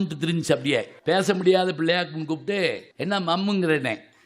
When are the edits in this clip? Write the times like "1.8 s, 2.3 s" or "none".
0.9 s, 2.9 s